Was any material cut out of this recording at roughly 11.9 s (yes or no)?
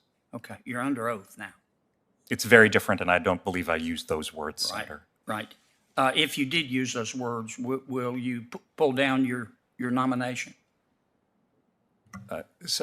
no